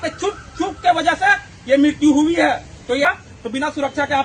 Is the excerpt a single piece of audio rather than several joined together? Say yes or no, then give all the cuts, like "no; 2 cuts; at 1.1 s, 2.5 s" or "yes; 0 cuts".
no; 1 cut; at 3.1 s